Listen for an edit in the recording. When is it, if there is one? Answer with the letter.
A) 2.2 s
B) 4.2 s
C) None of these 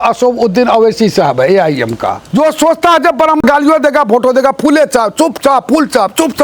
A